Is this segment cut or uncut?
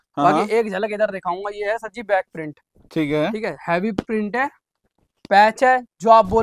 uncut